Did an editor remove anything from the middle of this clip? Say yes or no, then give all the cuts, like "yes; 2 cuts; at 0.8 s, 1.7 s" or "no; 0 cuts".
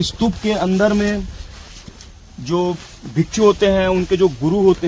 no; 0 cuts